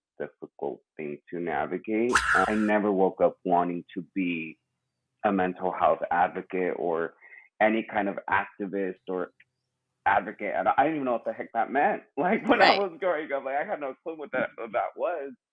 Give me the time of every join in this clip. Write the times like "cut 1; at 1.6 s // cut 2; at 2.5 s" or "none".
cut 1; at 2.5 s